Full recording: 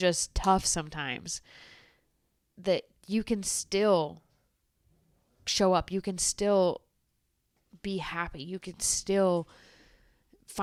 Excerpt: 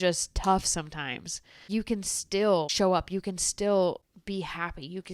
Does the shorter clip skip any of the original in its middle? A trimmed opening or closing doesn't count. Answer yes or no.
yes